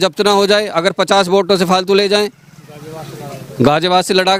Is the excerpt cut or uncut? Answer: uncut